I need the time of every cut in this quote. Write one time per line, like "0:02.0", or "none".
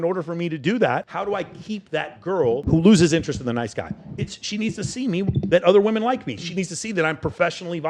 0:01.1
0:02.6